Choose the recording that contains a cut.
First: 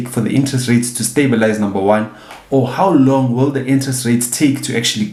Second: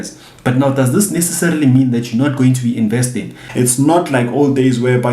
second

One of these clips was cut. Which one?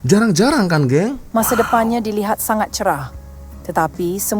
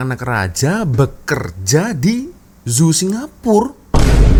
first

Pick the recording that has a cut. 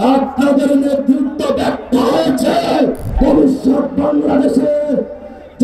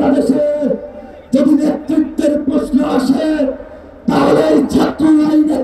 first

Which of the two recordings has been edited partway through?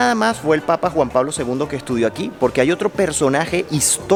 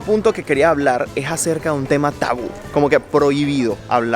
second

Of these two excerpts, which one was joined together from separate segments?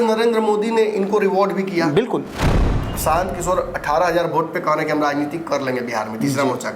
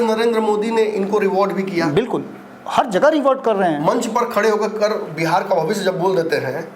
first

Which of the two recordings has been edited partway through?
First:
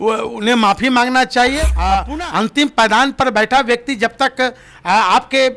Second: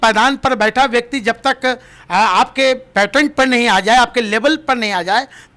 first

